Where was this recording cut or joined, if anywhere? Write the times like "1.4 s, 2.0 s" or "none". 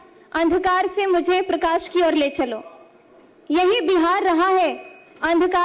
none